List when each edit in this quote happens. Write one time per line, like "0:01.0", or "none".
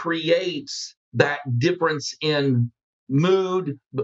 0:02.8